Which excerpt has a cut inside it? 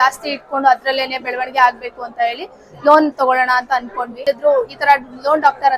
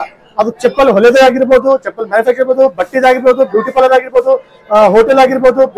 first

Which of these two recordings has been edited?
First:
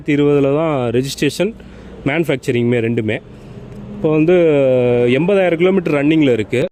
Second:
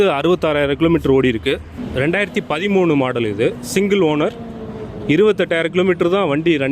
second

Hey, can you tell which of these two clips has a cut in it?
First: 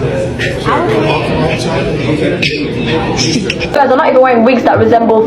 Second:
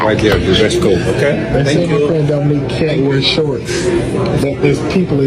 first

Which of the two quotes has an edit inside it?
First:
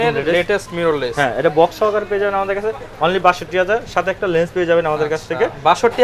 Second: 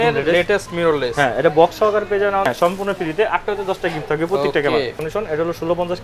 second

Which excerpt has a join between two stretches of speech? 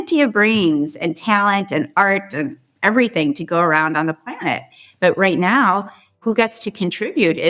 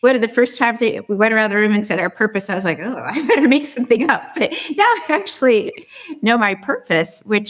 first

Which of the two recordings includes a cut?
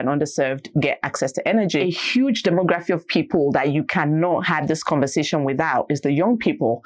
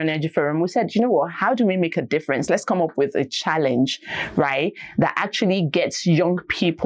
first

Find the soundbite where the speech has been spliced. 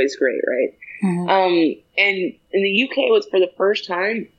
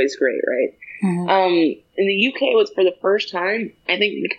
second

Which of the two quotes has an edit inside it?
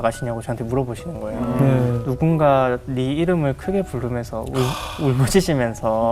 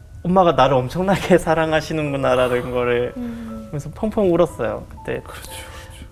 first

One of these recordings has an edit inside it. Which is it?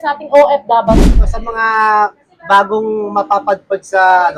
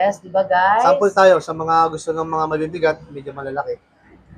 first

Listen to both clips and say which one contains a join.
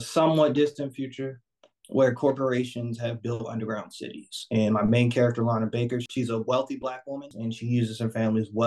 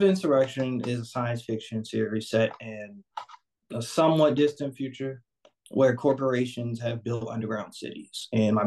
first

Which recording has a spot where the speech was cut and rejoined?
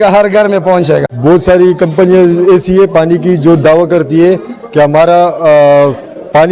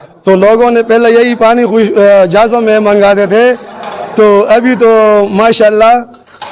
first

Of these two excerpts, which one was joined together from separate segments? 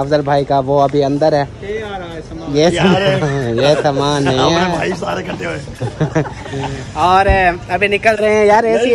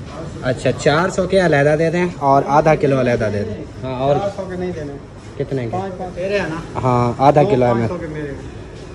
second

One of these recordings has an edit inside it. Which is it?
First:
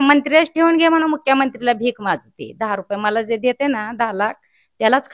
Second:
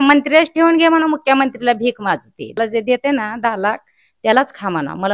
second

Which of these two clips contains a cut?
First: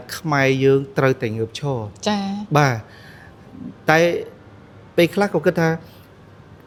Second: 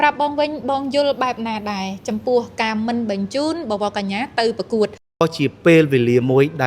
second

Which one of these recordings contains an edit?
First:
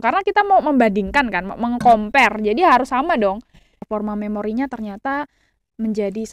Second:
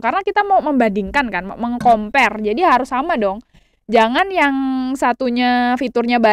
first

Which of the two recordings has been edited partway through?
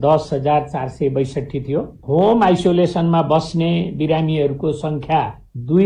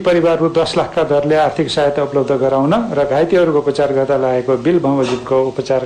first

